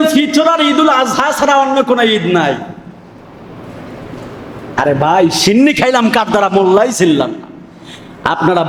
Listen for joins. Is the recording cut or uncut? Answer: uncut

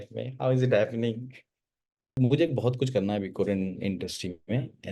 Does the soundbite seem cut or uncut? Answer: cut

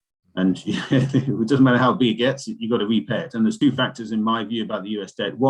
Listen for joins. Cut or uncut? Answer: cut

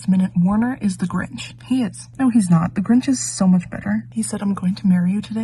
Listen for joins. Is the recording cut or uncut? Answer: uncut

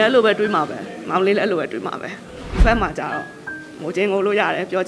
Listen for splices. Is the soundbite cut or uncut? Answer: cut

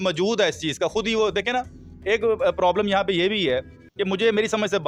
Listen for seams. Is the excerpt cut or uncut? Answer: uncut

